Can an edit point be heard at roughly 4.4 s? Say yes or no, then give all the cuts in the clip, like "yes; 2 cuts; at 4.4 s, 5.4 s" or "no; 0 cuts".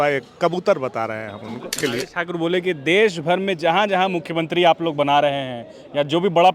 no; 1 cut; at 1.8 s